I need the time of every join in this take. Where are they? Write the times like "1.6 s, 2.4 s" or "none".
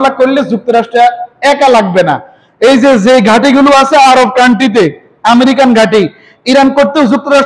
none